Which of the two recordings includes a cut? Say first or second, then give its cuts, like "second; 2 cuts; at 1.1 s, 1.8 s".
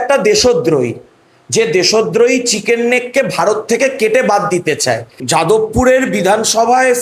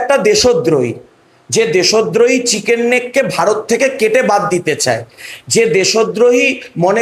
first; 1 cut; at 5.1 s